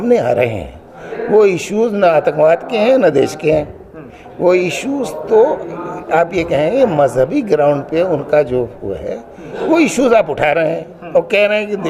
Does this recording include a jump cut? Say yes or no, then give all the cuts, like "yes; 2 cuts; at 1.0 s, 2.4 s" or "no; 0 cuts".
no; 0 cuts